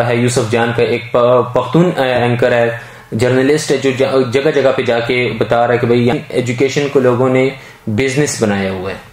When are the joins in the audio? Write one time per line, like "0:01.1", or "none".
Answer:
0:06.1